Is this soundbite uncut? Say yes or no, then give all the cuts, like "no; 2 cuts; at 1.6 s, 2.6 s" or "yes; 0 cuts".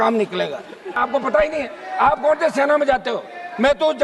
no; 1 cut; at 1.0 s